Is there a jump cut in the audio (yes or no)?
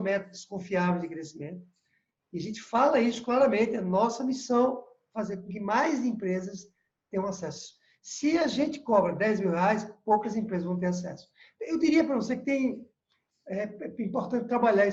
no